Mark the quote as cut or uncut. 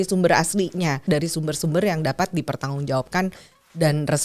cut